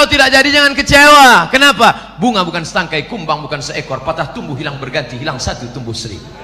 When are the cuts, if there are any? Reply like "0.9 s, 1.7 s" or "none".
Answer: none